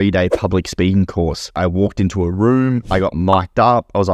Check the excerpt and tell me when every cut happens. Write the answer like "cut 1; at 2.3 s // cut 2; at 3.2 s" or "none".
cut 1; at 1.5 s // cut 2; at 2.8 s